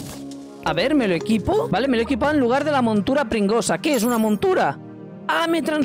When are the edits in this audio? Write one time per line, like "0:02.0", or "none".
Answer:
none